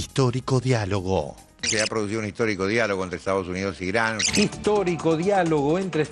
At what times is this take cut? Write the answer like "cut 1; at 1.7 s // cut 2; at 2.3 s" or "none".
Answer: cut 1; at 1.6 s